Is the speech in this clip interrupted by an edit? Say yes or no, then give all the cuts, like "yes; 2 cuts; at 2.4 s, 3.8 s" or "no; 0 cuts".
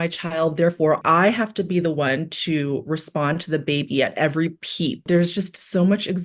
yes; 2 cuts; at 1.0 s, 5.0 s